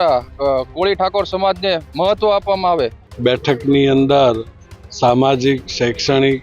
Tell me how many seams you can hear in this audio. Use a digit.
1